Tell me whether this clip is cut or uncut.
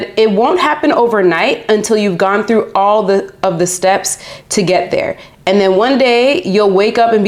uncut